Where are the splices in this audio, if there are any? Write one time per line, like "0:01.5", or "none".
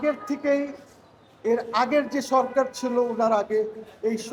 none